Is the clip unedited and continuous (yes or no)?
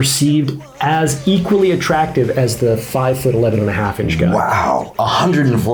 yes